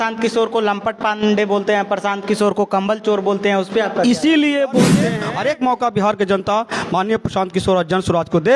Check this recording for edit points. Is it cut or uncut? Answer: cut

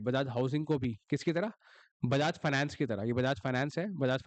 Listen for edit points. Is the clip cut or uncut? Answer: uncut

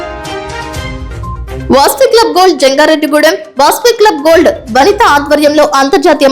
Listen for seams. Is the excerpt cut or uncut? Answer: cut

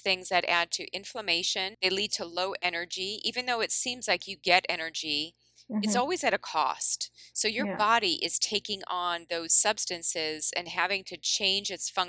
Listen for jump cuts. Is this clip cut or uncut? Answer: cut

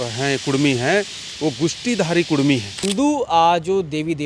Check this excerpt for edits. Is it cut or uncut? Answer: cut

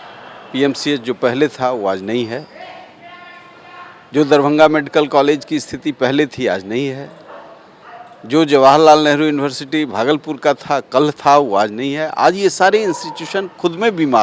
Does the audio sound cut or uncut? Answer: uncut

